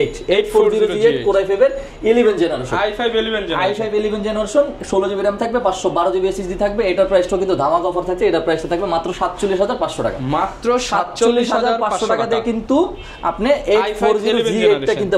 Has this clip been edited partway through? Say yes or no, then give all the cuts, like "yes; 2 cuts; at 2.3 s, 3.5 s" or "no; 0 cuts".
no; 0 cuts